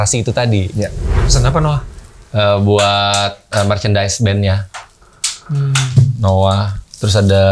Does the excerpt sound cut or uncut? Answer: cut